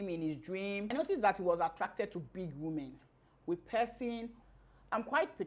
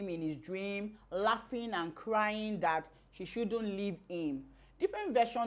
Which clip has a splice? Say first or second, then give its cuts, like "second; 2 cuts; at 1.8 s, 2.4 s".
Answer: first; 2 cuts; at 0.9 s, 4.3 s